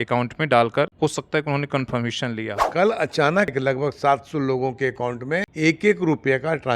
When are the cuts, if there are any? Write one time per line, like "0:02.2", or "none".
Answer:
0:00.9
0:02.6
0:03.5
0:05.5